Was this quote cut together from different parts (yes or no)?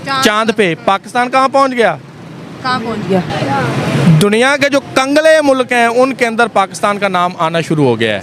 yes